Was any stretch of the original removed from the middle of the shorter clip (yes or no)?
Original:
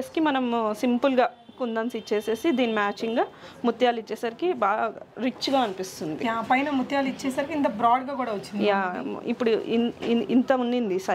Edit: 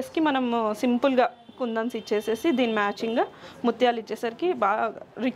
no